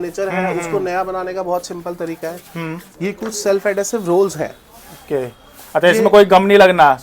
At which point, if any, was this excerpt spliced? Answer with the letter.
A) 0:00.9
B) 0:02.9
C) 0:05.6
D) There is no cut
D